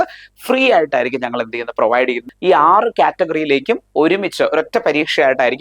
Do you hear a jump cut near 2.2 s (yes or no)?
yes